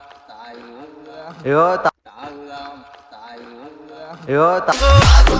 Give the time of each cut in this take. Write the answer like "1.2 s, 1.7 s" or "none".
1.9 s, 4.7 s